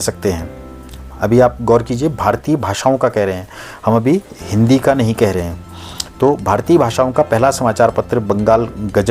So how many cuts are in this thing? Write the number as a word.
zero